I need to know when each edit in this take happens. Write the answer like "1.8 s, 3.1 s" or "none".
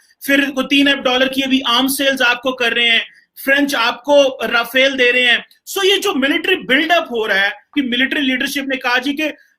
7.7 s